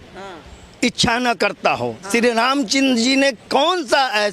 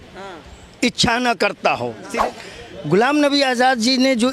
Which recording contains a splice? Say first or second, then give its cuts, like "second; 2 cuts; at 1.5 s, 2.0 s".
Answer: second; 1 cut; at 2.0 s